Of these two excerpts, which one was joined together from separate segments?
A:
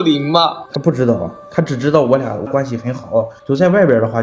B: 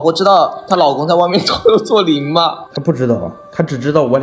A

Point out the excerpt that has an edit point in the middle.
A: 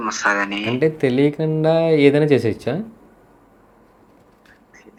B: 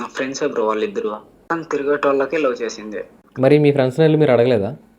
B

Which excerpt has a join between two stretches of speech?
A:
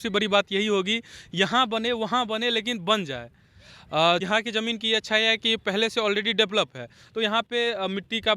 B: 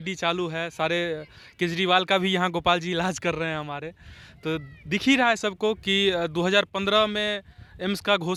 A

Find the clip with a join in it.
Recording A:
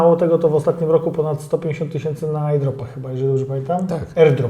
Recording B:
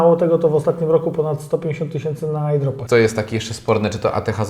B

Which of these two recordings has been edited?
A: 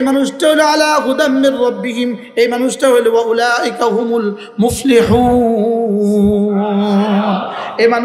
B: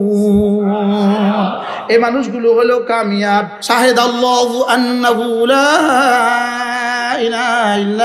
B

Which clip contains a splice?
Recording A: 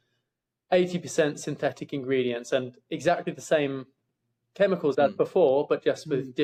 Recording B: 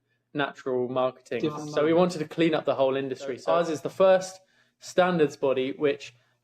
B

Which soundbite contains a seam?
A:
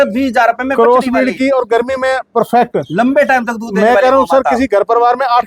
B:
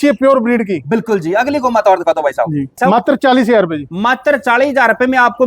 B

